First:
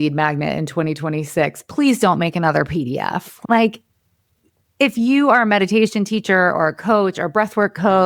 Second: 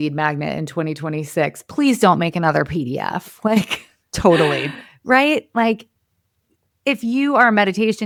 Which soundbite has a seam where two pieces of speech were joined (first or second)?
first